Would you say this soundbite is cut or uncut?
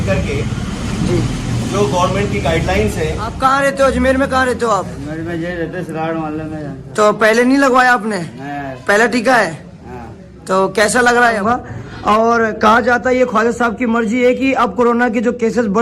cut